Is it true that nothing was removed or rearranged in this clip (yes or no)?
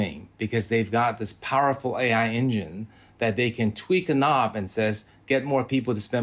yes